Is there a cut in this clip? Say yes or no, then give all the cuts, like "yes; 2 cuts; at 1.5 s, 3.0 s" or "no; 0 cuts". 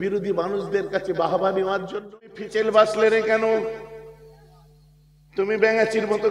yes; 1 cut; at 2.4 s